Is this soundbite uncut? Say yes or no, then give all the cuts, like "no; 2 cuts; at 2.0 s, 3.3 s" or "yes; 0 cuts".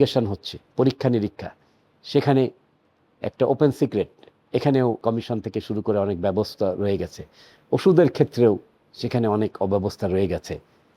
no; 1 cut; at 5.0 s